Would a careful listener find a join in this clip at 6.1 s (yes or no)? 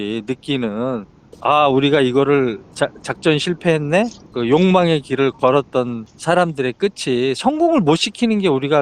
yes